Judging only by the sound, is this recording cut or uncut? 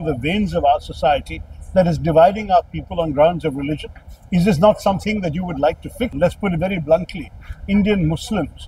cut